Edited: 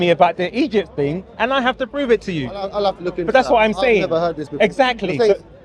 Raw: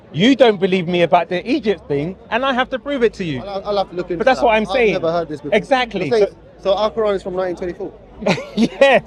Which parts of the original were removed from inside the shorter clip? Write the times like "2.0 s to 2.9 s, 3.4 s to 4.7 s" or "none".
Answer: none